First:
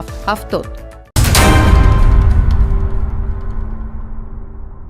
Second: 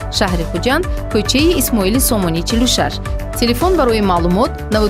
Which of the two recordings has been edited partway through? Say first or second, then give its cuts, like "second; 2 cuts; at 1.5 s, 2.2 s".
first; 1 cut; at 1.1 s